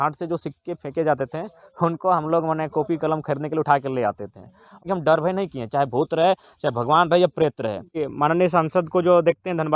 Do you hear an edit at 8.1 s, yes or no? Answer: yes